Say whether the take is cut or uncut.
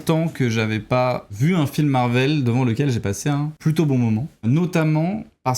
cut